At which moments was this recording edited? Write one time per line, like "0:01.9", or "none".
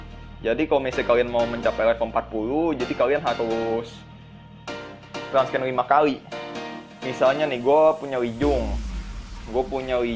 0:08.0